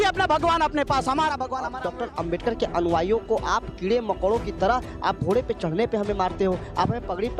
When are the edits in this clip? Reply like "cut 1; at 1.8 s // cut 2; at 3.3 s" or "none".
cut 1; at 1.8 s